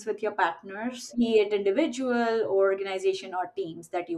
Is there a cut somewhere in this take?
yes; 1 cut; at 1.0 s

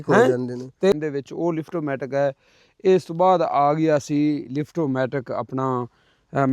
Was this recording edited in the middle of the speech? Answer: yes; 1 cut; at 1.0 s

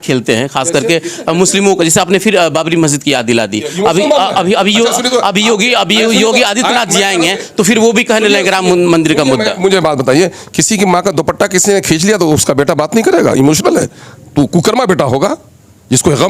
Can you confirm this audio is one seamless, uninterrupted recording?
yes; 0 cuts

